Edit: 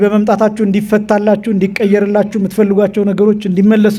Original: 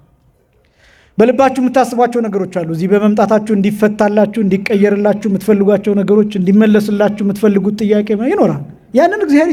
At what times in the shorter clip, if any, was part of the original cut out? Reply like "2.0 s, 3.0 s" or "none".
none